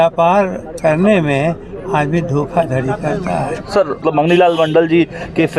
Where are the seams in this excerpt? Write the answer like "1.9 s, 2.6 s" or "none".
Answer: 4.0 s